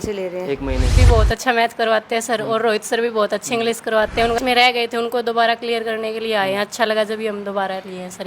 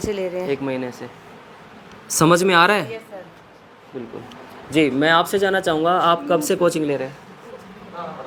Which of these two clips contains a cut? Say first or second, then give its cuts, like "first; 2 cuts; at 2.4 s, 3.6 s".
first; 2 cuts; at 1.0 s, 4.4 s